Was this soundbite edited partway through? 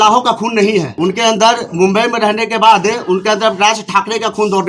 yes; 1 cut; at 0.9 s

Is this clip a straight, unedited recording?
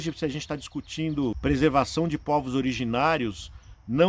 no; 1 cut; at 1.4 s

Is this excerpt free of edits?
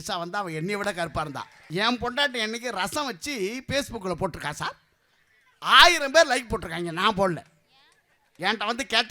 no; 1 cut; at 1.5 s

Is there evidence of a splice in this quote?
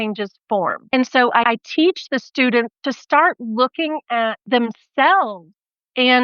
yes; 3 cuts; at 1.5 s, 2.8 s, 4.4 s

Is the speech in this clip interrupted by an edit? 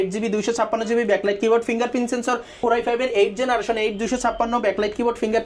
yes; 1 cut; at 2.5 s

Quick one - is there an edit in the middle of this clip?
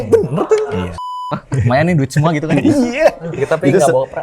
yes; 1 cut; at 1.3 s

